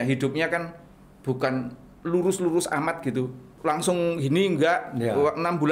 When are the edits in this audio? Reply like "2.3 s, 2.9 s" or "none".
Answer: 3.4 s